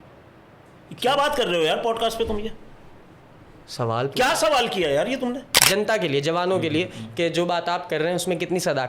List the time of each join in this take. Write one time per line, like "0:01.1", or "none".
0:05.7